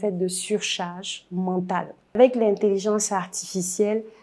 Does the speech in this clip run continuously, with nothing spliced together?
no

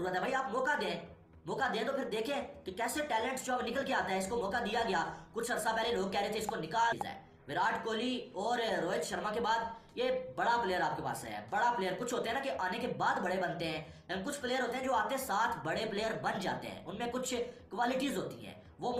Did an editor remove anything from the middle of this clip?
no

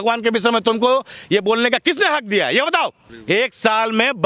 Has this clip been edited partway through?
yes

